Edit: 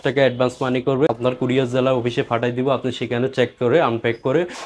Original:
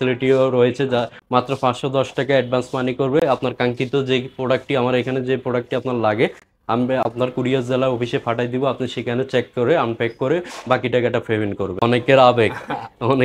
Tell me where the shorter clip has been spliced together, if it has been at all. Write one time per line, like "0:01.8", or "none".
0:01.1

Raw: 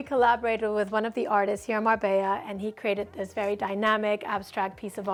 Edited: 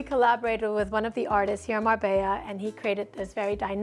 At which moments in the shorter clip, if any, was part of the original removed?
none

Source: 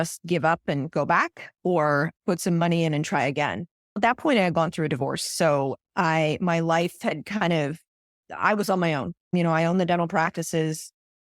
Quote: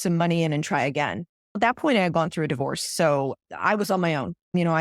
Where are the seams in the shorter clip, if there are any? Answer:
0:03.4

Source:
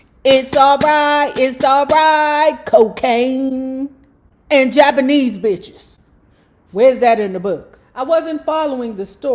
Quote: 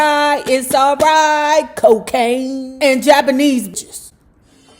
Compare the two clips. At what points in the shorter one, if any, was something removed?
0:02.6
0:03.7

